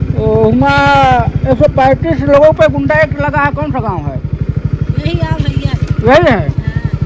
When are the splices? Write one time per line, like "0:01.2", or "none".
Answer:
none